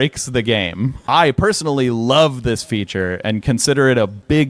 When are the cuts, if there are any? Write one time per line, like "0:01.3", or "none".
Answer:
0:01.0